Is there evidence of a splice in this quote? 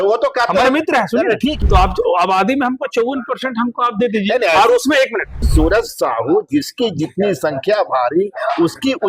yes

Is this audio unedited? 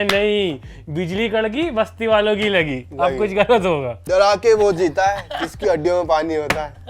no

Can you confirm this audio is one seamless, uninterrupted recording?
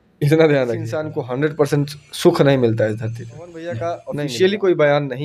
no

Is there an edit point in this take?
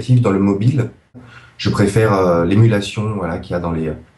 yes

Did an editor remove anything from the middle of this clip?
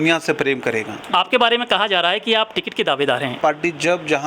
yes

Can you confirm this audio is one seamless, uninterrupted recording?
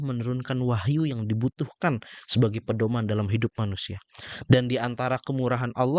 yes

